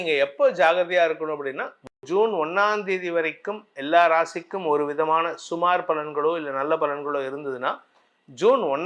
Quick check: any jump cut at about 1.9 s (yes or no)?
yes